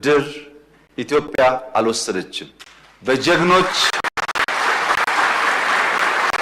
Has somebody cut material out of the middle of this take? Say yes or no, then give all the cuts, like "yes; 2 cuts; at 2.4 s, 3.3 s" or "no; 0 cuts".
no; 0 cuts